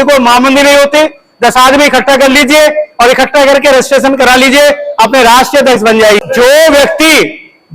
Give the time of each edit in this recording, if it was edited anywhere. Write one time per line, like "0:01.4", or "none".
0:06.2